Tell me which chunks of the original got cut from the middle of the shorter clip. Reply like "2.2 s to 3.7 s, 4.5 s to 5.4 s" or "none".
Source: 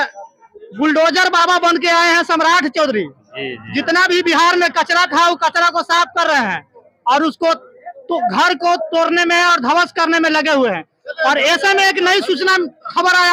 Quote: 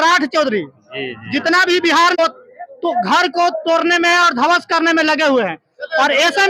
4.6 s to 7.4 s